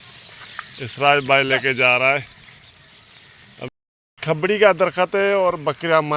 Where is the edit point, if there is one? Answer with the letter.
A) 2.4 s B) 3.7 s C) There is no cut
B